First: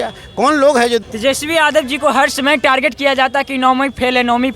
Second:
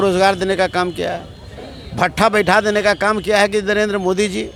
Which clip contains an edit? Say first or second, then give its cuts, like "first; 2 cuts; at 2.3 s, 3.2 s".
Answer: first; 1 cut; at 1.0 s